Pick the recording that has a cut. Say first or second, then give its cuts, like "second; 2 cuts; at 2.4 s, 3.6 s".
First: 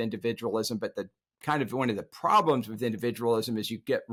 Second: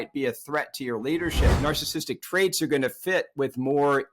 second; 1 cut; at 1.6 s